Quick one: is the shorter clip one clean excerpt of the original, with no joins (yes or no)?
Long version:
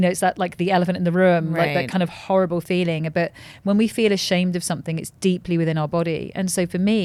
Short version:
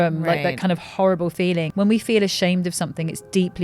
no